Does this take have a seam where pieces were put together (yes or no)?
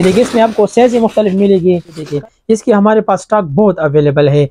yes